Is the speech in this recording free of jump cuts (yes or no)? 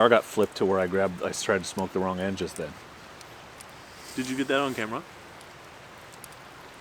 yes